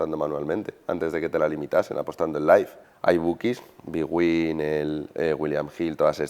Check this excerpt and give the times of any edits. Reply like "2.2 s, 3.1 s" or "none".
2.8 s